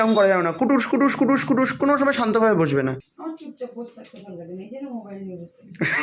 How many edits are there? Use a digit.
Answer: 1